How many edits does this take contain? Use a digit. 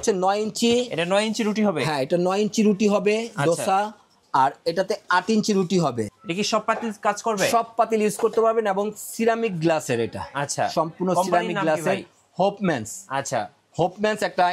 1